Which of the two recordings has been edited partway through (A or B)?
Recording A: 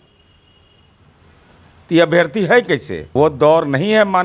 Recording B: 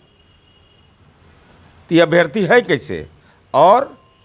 A